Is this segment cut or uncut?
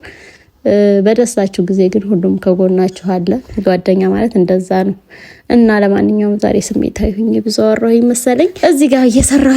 cut